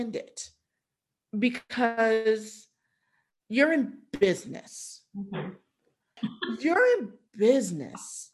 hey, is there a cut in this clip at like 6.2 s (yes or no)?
yes